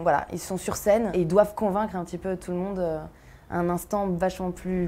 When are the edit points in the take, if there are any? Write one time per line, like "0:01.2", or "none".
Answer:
none